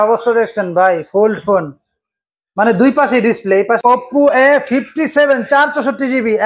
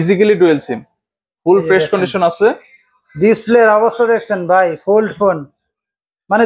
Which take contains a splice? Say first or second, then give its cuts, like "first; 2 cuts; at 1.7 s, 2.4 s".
first; 1 cut; at 3.8 s